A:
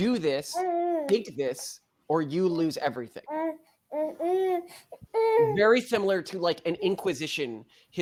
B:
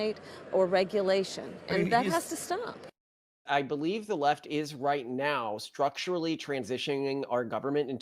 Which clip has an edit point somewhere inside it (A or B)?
B